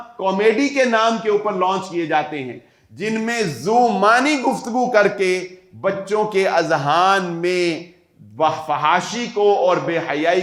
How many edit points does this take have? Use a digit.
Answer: 0